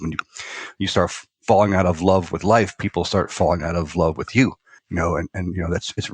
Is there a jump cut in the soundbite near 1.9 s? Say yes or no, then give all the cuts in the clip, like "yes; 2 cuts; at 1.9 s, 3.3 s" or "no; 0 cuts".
no; 1 cut; at 4.8 s